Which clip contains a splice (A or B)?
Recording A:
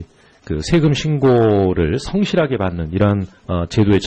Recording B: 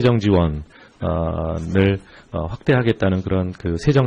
B